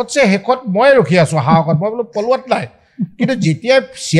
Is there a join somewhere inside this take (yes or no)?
no